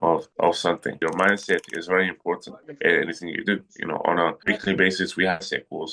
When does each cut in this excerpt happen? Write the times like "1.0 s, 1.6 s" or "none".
1.0 s